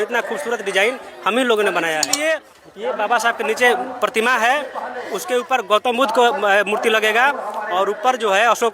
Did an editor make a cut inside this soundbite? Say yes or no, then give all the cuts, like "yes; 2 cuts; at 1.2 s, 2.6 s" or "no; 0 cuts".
yes; 1 cut; at 2.1 s